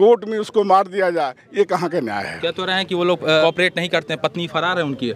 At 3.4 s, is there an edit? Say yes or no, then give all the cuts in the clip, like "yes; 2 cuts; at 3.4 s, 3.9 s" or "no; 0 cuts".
yes; 1 cut; at 3.4 s